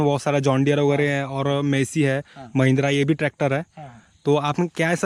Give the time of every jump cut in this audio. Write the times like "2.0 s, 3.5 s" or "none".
none